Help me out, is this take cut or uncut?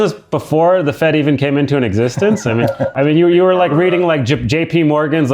cut